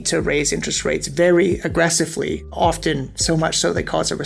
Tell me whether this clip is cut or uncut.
cut